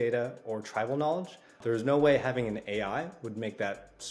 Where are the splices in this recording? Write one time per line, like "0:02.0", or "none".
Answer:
0:01.6